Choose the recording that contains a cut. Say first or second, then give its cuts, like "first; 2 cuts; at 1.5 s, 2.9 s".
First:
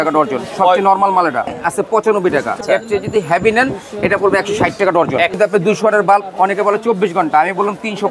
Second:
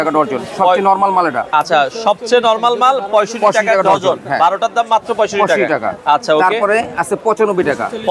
first; 3 cuts; at 1.5 s, 2.6 s, 5.4 s